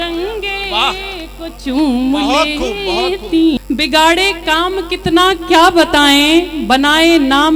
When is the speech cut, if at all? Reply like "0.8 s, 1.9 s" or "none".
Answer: 3.6 s